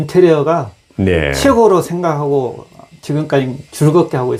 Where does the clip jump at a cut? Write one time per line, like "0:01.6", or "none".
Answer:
none